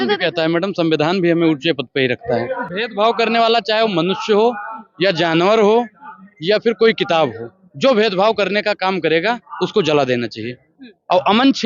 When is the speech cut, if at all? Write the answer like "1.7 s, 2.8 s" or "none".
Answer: 2.6 s